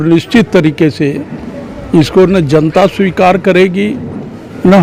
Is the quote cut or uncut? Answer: uncut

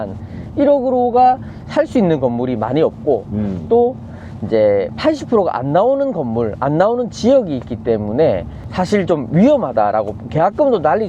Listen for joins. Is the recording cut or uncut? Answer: uncut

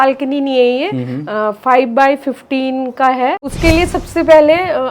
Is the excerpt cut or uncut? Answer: cut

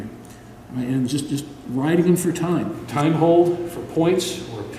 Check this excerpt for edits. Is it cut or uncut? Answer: cut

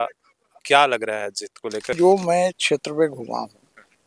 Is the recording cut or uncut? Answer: cut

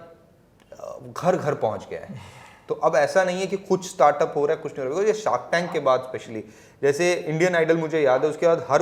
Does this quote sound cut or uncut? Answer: uncut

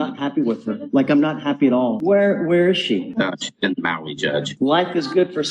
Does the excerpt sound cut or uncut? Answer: cut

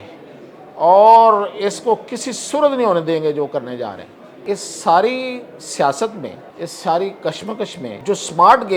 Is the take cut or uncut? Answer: cut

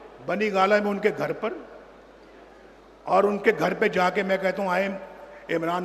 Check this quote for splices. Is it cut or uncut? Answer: uncut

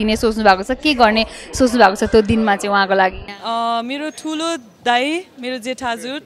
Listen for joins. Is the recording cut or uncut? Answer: cut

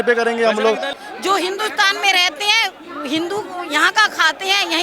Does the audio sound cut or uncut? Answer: cut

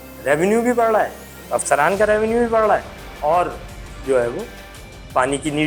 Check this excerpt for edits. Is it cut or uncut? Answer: uncut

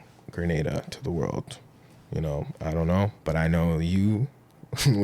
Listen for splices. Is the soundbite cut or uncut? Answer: cut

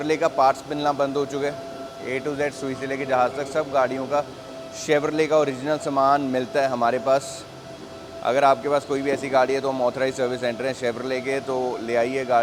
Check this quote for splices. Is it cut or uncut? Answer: uncut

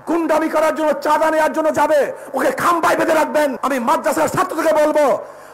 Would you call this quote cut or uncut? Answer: cut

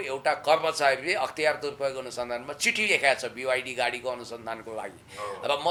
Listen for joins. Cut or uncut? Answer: uncut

